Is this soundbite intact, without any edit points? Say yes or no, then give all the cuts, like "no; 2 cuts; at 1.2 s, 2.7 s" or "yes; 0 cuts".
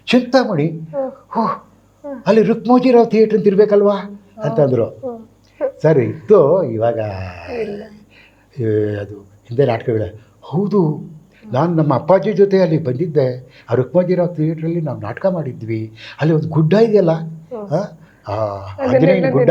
yes; 0 cuts